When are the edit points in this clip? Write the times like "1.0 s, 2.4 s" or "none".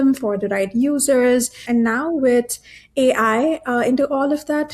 1.6 s